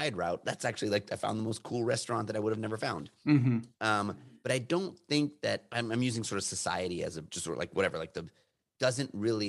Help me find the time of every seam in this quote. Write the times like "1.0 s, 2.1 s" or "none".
4.3 s, 5.7 s, 7.3 s